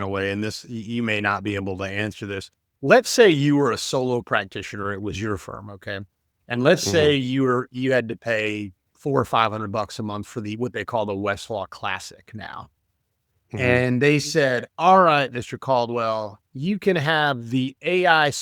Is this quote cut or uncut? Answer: uncut